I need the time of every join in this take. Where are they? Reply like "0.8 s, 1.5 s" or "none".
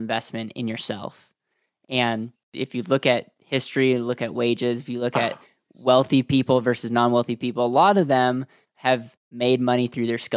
2.5 s, 9.3 s